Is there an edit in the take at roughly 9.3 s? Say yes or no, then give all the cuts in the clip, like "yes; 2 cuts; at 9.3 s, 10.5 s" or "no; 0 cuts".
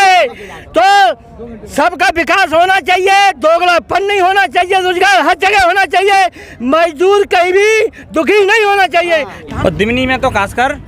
yes; 1 cut; at 9.3 s